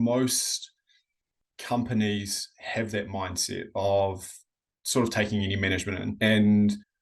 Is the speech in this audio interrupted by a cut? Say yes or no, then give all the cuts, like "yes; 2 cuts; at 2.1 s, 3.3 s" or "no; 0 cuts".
yes; 1 cut; at 6.1 s